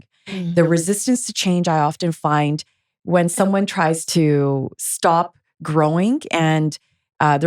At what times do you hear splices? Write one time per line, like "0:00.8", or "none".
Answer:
0:04.0